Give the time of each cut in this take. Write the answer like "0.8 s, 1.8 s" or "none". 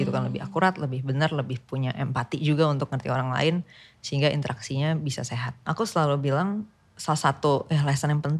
5.6 s